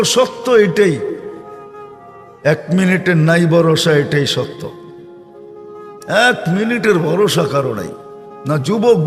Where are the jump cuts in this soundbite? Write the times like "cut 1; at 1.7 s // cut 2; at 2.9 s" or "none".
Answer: none